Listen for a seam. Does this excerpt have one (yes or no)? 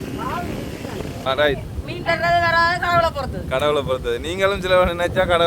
yes